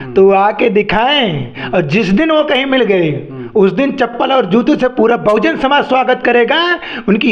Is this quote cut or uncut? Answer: uncut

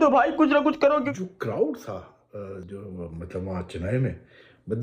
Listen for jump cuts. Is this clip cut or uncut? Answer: cut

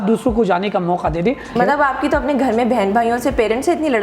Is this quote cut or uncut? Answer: cut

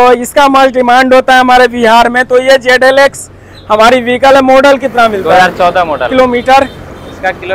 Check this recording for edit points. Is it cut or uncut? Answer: uncut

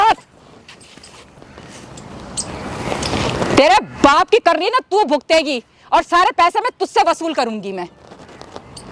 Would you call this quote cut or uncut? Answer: uncut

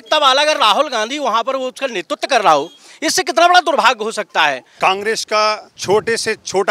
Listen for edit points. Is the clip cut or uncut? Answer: cut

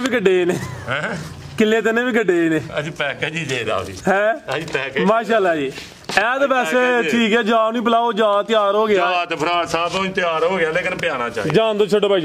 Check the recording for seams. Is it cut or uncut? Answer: uncut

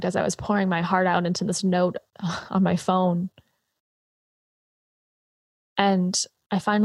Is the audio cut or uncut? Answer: uncut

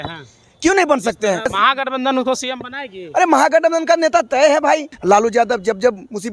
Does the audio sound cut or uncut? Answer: cut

